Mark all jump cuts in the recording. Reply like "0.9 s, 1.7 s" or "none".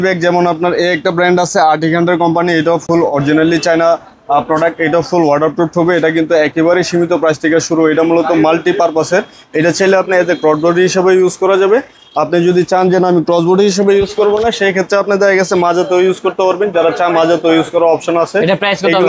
none